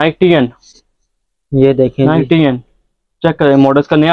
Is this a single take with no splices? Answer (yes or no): yes